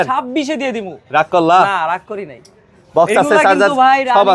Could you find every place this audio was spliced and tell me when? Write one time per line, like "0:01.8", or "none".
none